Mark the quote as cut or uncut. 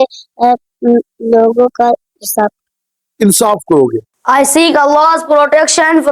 cut